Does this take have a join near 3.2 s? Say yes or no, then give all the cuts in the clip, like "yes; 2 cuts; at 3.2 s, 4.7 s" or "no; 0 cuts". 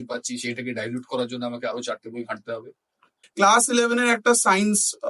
yes; 1 cut; at 3.2 s